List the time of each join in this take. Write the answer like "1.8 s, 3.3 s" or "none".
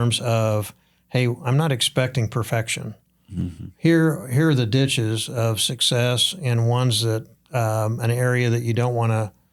none